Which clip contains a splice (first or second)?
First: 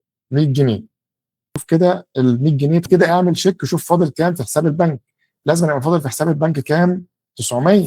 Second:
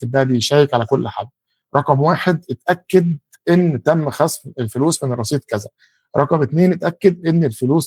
first